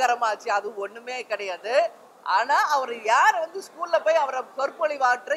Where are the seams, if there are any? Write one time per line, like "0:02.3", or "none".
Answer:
none